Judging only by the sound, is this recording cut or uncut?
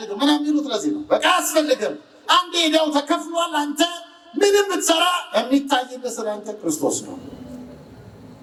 uncut